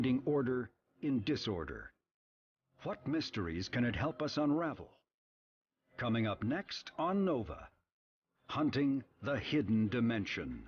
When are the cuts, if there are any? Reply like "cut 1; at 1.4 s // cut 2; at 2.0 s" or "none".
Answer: cut 1; at 3.1 s

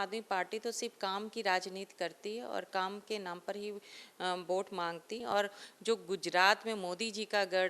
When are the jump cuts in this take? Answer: cut 1; at 5.2 s

